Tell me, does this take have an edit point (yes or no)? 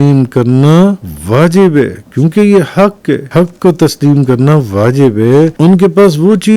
yes